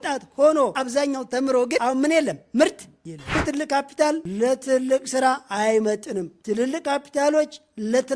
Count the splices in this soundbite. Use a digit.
3